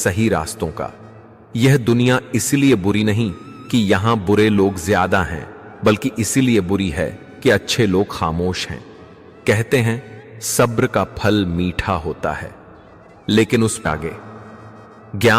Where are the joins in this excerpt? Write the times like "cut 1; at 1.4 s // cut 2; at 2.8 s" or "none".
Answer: cut 1; at 13.9 s